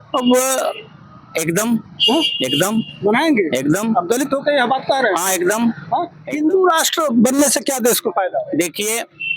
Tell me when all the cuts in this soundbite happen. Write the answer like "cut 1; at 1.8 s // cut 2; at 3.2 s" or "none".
cut 1; at 6.2 s